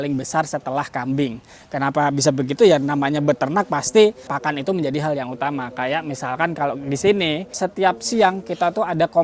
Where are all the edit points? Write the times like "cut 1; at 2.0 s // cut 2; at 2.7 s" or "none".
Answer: none